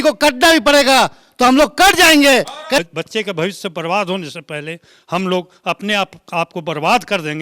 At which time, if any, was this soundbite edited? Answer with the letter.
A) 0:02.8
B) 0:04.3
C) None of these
A